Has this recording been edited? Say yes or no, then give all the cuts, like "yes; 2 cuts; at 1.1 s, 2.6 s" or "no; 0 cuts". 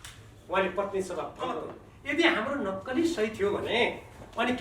yes; 1 cut; at 1.9 s